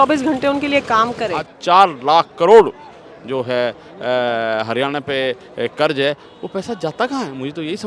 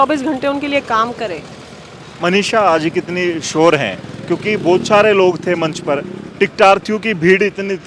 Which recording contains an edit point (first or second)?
first